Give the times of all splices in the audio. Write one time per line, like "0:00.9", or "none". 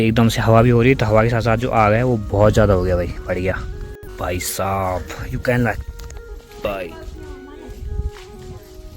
0:04.1